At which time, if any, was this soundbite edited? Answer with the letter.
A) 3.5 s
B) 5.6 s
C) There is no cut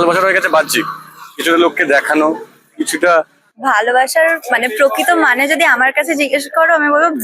A